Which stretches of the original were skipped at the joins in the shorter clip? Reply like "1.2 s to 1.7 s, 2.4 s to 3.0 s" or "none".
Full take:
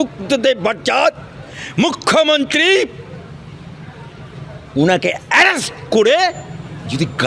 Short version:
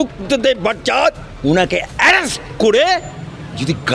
1.3 s to 4.6 s

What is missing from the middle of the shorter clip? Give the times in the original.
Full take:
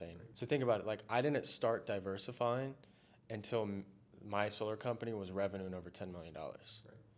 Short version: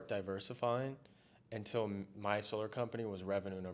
3.9 s to 4.2 s

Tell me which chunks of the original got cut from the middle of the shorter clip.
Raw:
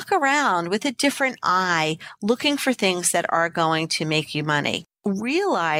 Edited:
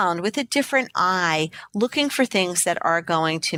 none

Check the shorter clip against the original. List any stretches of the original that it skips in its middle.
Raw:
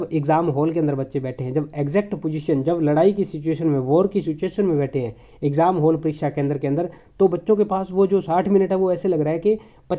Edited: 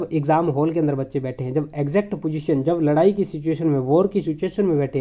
none

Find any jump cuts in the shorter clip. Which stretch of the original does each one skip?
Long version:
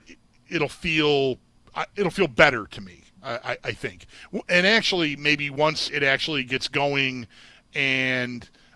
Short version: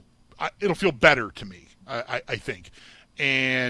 4.1 s to 7.3 s

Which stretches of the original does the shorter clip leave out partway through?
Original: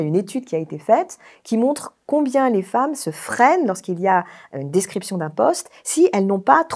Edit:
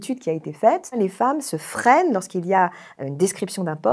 1.2 s to 2.5 s

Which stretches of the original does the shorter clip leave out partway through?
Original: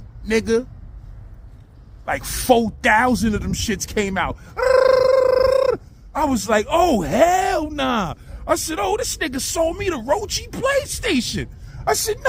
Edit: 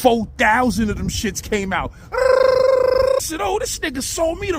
5.7 s to 8.6 s

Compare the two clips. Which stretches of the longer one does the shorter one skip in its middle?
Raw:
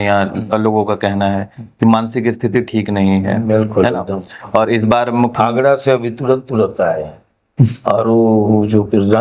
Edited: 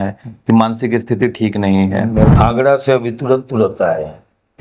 3.7 s to 5.3 s

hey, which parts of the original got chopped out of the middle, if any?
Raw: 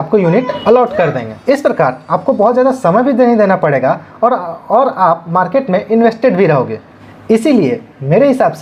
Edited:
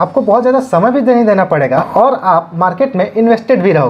4.0 s to 4.6 s

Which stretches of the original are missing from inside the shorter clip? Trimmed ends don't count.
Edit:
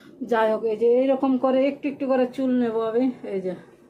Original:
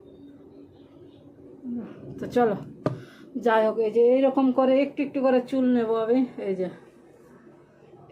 none

